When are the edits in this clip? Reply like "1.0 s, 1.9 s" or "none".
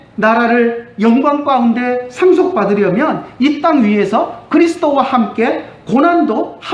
none